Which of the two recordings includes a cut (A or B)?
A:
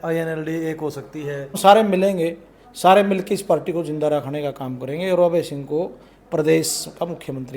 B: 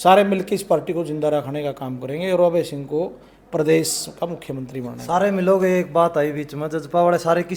A